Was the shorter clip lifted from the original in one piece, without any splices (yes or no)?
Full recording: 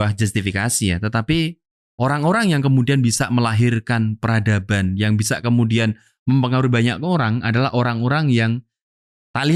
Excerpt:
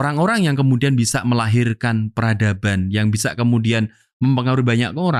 yes